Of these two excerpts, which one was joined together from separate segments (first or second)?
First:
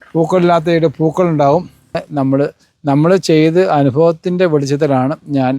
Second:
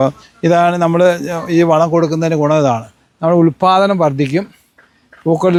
first